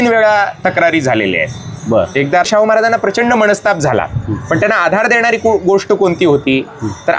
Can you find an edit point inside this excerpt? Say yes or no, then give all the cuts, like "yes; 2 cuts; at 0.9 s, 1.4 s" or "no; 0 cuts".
yes; 1 cut; at 2.4 s